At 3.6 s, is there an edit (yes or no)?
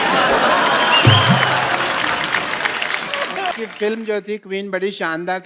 yes